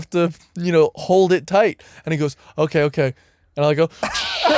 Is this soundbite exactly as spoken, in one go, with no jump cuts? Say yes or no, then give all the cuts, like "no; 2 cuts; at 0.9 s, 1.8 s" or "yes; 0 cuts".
yes; 0 cuts